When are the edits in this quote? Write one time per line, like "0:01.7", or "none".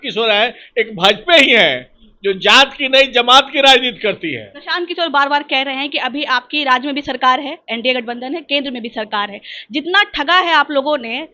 0:04.6